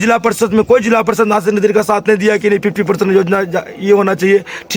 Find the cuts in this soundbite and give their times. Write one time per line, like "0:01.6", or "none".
none